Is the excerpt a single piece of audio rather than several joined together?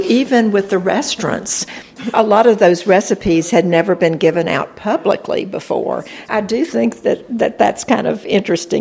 no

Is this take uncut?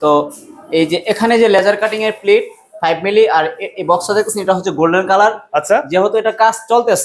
yes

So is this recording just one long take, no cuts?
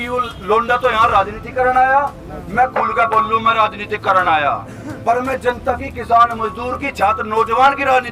yes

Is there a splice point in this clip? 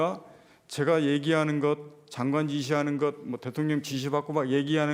no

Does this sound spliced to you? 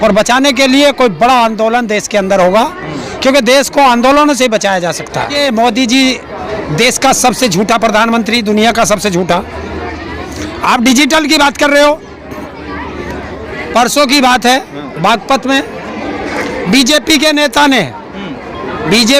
yes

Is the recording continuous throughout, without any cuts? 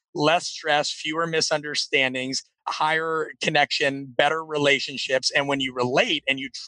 no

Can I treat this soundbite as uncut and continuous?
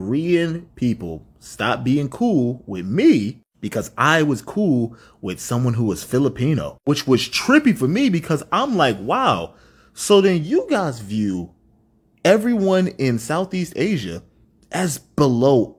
yes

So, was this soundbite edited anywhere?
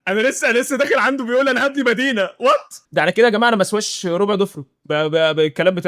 yes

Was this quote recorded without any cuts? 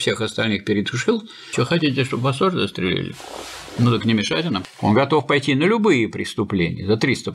no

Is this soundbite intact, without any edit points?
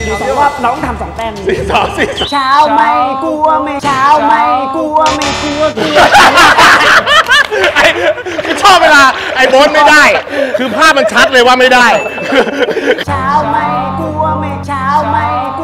yes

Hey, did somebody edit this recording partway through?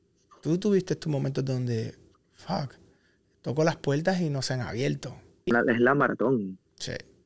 yes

